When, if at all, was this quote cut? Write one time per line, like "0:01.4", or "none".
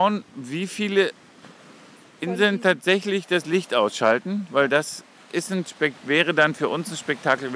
none